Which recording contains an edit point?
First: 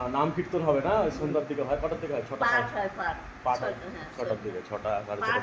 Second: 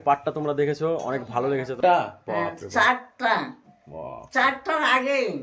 second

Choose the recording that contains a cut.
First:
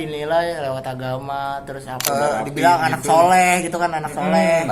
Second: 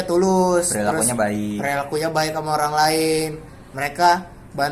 first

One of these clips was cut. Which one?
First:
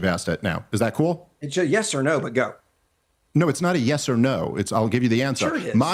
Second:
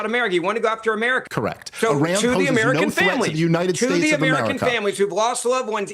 second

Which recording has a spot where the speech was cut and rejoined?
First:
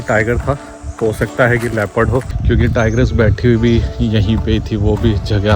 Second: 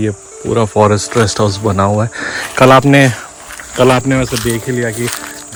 first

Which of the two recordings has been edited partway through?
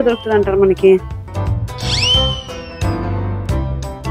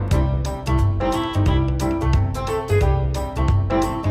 first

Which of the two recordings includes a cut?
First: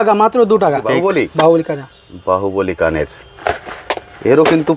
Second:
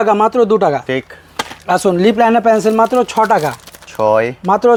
first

